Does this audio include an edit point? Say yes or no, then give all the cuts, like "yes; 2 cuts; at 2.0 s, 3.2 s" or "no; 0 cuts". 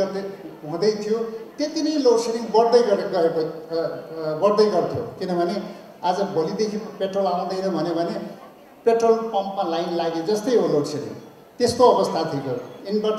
no; 0 cuts